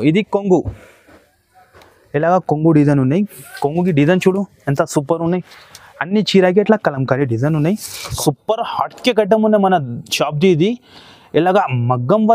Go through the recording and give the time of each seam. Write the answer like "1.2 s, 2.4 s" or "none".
8.1 s